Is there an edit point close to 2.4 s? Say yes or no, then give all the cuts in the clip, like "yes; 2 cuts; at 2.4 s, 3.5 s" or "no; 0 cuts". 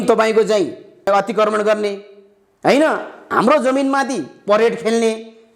no; 1 cut; at 1.1 s